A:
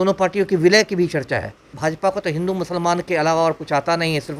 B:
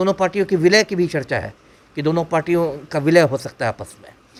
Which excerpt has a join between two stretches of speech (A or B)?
A